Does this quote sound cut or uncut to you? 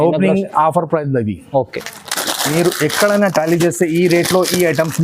cut